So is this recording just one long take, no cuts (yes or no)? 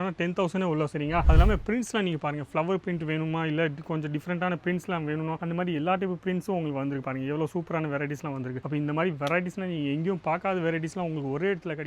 no